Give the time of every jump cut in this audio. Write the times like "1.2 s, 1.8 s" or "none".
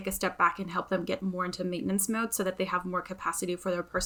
none